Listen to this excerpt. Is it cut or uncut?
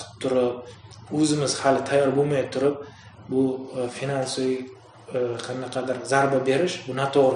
uncut